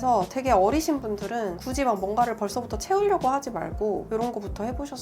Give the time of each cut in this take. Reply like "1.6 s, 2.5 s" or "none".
4.0 s